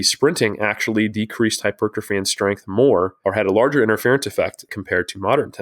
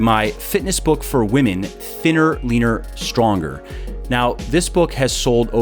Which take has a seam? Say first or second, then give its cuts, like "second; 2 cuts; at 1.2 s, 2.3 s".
first; 2 cuts; at 3.1 s, 4.7 s